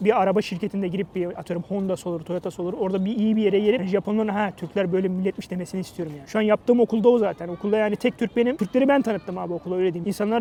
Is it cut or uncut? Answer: uncut